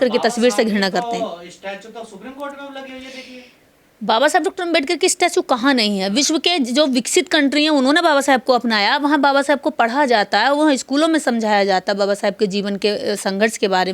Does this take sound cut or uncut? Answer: uncut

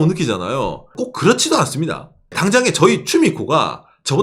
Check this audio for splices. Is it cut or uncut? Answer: cut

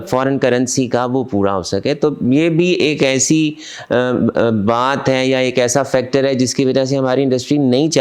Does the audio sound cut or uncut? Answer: uncut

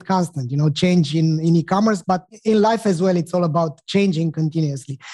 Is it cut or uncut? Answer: cut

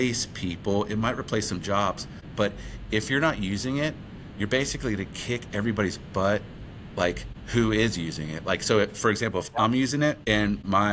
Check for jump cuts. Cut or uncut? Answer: uncut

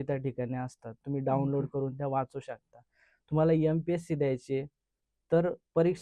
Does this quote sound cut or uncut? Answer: uncut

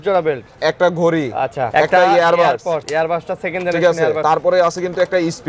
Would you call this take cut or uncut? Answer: cut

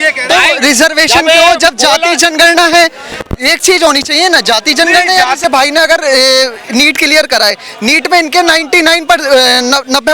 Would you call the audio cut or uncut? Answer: cut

